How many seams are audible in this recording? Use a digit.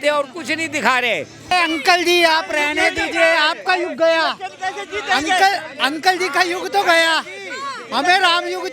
0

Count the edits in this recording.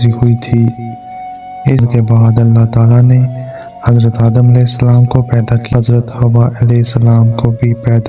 2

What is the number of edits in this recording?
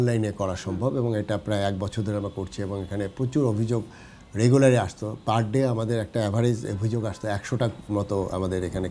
0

